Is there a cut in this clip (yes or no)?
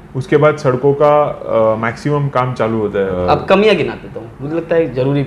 yes